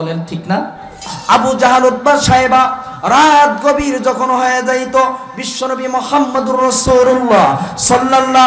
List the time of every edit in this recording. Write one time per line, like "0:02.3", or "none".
0:01.1